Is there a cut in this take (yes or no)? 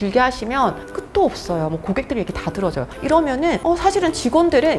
yes